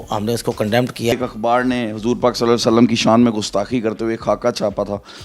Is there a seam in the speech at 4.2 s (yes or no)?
no